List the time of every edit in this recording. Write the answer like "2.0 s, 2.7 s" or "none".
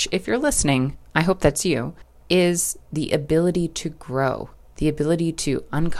2.1 s